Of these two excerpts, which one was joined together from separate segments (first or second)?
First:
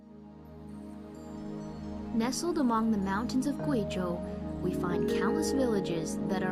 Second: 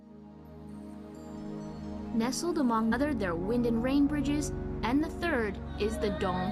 first